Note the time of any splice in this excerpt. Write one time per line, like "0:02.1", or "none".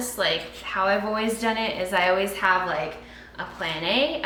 none